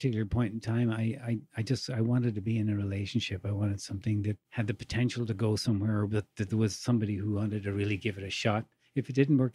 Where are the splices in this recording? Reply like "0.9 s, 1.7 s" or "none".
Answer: none